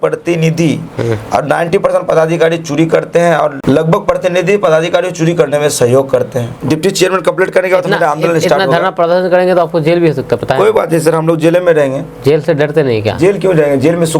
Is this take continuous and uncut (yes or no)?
no